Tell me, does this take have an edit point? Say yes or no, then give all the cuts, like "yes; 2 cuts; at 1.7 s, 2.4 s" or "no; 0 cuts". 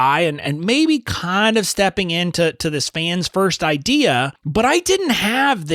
yes; 1 cut; at 4.4 s